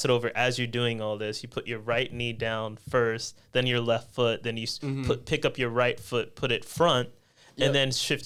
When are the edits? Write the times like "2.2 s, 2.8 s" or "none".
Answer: none